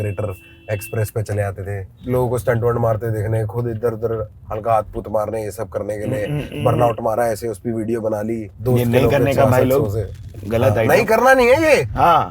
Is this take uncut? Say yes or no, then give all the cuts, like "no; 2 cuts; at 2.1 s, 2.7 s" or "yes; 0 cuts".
no; 1 cut; at 8.5 s